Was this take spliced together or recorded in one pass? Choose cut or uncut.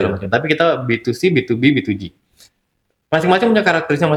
uncut